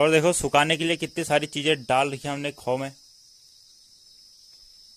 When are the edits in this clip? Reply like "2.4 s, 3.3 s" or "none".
none